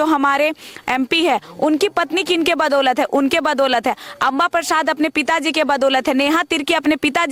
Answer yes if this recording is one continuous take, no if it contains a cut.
yes